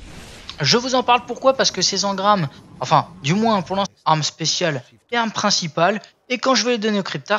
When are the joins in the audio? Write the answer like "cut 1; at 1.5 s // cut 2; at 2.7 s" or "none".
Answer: none